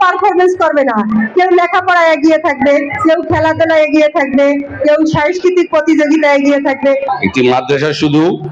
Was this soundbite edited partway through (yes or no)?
yes